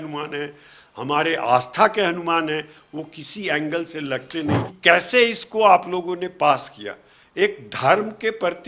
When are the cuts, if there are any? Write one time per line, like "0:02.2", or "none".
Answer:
0:04.7